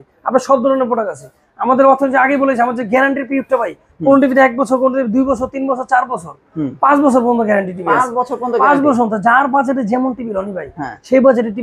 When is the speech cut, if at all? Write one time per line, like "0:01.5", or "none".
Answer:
none